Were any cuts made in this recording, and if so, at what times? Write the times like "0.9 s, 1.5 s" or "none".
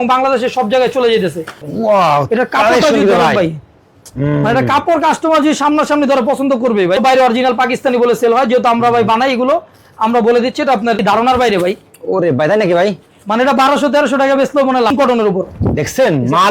1.7 s, 7.0 s, 11.0 s, 14.9 s

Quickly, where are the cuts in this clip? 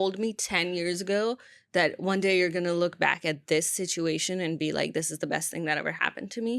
none

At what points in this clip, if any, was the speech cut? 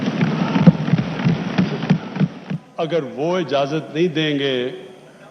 2.4 s

